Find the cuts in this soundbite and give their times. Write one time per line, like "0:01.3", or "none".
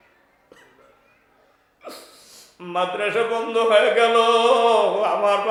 none